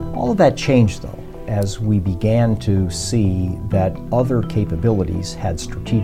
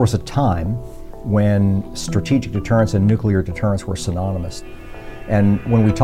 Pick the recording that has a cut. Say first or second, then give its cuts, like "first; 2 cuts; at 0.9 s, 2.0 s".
second; 1 cut; at 4.6 s